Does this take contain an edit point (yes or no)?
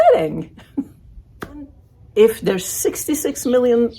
yes